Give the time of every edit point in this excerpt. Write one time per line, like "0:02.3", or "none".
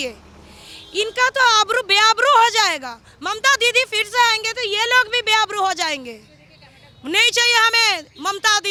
none